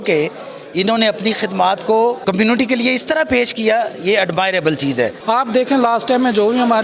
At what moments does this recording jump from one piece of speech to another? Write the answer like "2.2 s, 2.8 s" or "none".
2.2 s, 5.2 s